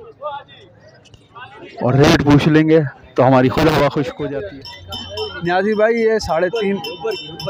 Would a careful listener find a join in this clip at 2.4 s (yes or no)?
no